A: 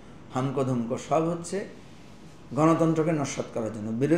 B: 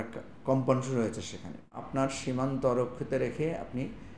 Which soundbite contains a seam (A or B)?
B